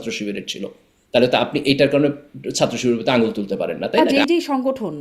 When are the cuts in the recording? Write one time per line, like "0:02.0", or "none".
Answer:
0:04.1